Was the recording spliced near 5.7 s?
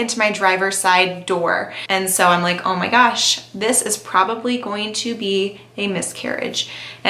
no; 1 cut; at 1.8 s

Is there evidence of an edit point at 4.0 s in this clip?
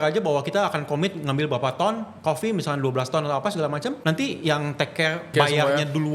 yes; 2 cuts; at 4.0 s, 5.3 s

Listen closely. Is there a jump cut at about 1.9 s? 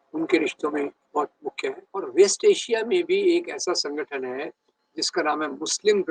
yes; 1 cut; at 1.9 s

